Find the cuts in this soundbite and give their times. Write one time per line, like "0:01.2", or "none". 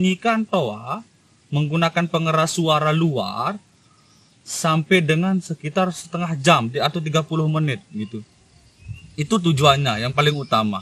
none